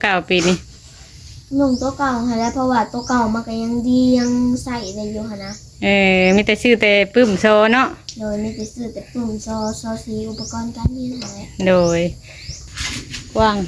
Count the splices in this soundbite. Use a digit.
1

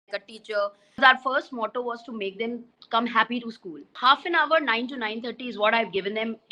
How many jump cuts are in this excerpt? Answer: 2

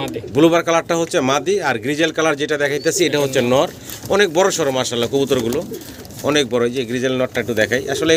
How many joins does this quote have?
0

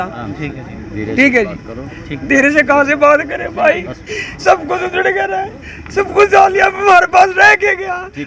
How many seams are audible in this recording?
0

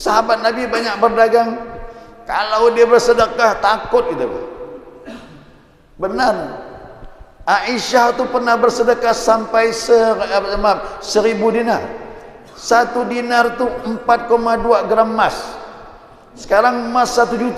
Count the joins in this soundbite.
0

